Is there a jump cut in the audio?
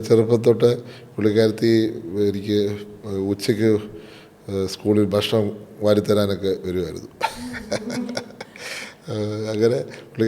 no; 0 cuts

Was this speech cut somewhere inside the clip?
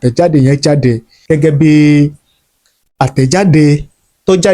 yes; 1 cut; at 1.1 s

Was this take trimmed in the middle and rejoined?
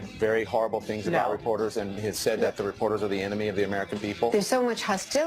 yes; 1 cut; at 4.3 s

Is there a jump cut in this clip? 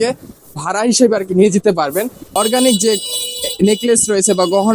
yes; 1 cut; at 2.2 s

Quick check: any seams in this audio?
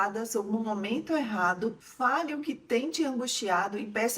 yes; 1 cut; at 1.8 s

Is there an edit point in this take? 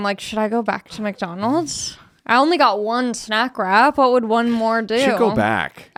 no; 0 cuts

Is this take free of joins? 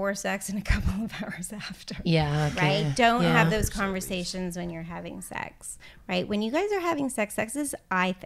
yes; 0 cuts

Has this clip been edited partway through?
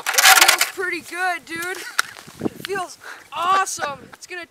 no; 0 cuts

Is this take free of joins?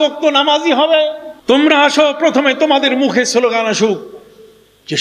no; 1 cut; at 1.3 s

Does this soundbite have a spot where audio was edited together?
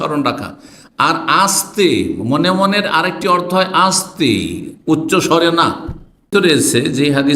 yes; 1 cut; at 6.3 s

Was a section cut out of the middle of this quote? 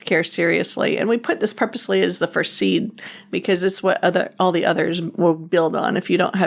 no; 0 cuts

